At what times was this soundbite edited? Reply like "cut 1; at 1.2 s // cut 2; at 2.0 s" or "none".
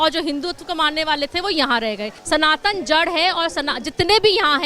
cut 1; at 2.1 s